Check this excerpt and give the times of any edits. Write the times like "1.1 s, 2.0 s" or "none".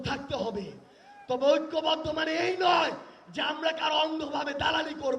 none